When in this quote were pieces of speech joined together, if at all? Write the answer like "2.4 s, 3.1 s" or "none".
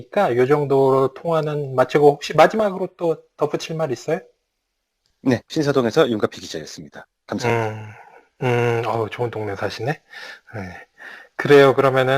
10.1 s